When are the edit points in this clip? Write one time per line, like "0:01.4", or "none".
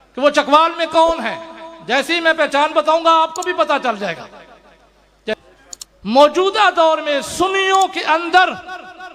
0:05.3